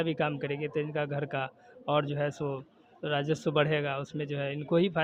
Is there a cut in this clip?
no; 0 cuts

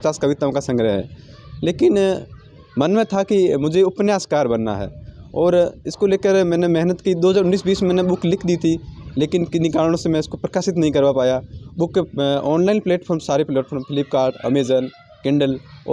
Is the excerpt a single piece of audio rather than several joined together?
no; 1 cut; at 11.6 s

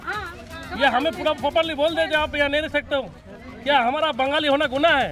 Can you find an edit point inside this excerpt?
no; 0 cuts

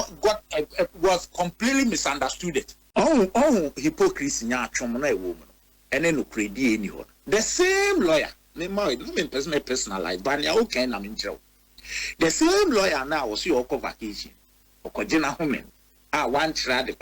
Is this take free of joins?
no; 1 cut; at 2.8 s

